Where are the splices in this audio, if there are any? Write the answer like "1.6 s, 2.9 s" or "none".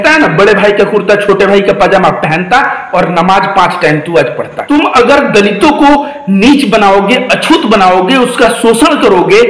4.6 s